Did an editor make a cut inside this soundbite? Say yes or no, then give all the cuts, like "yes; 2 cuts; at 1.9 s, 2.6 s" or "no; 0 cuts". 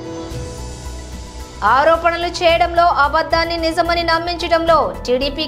yes; 1 cut; at 1.2 s